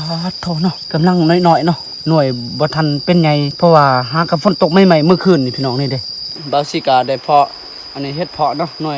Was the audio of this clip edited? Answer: yes; 3 cuts; at 0.8 s, 3.5 s, 6.4 s

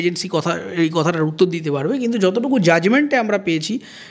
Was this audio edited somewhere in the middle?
no; 0 cuts

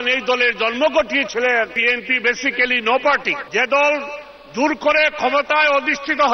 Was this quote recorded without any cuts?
no; 2 cuts; at 1.8 s, 3.4 s

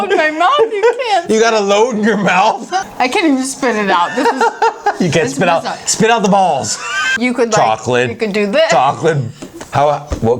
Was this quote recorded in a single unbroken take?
no; 2 cuts; at 2.9 s, 7.1 s

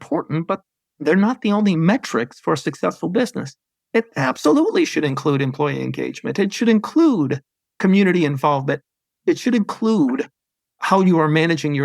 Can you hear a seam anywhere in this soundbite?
yes; 1 cut; at 1.8 s

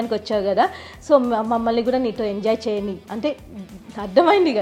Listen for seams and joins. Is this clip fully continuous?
yes; 0 cuts

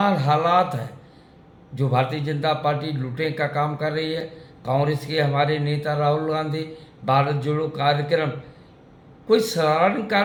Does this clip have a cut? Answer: no; 0 cuts

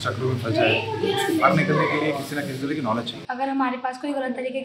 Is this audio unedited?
no; 1 cut; at 3.2 s

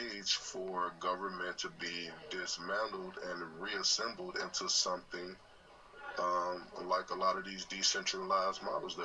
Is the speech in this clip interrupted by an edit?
no; 0 cuts

